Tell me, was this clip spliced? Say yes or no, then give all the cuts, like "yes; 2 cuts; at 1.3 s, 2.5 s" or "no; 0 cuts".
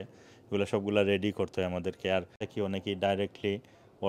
yes; 1 cut; at 2.4 s